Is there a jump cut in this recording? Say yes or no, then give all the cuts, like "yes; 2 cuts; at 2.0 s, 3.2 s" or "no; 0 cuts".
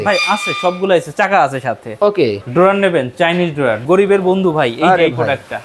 yes; 2 cuts; at 2.4 s, 3.8 s